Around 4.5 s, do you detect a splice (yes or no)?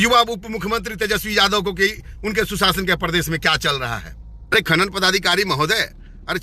yes